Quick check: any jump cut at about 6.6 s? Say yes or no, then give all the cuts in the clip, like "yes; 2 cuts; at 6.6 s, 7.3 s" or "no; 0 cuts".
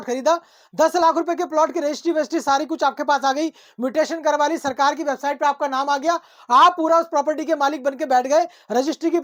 no; 0 cuts